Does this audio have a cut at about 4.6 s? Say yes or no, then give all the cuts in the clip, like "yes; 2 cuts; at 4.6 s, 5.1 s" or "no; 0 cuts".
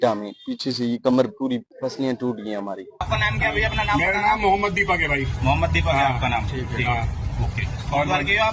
no; 2 cuts; at 1.7 s, 3.0 s